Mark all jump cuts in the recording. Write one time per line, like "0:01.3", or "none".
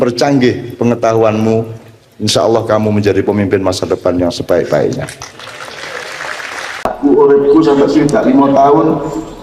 0:06.9